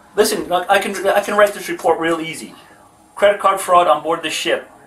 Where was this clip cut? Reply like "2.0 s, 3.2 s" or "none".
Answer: none